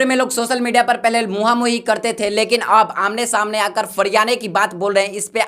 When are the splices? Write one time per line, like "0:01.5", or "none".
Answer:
none